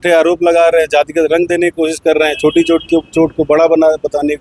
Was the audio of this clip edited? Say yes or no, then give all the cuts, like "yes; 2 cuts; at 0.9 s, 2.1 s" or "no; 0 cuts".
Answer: no; 0 cuts